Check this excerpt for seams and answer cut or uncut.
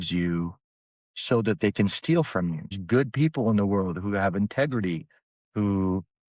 cut